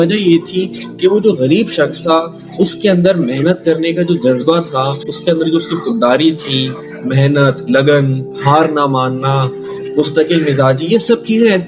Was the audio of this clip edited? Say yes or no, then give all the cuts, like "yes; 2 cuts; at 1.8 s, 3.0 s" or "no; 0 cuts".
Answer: no; 0 cuts